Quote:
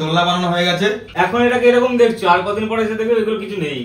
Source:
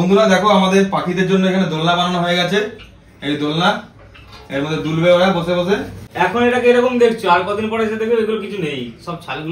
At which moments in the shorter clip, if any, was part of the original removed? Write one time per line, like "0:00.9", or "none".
0:01.0